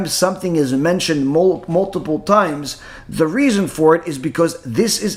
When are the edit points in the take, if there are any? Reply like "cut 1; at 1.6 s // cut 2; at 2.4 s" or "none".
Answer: none